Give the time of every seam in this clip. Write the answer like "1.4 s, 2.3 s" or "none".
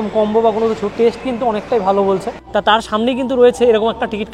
2.4 s